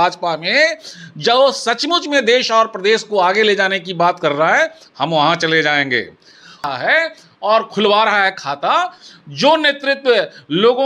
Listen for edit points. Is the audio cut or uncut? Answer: cut